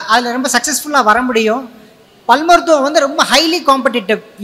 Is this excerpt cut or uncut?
uncut